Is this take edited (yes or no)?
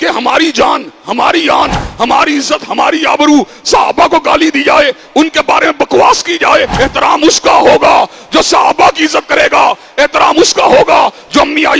yes